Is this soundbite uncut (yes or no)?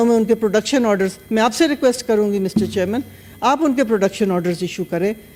yes